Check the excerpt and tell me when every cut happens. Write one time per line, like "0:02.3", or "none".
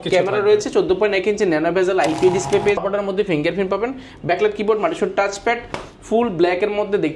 0:02.8